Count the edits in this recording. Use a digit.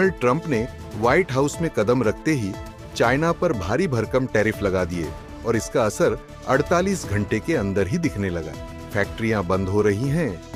0